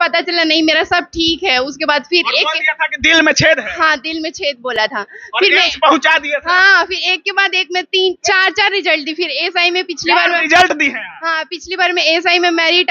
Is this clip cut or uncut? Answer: uncut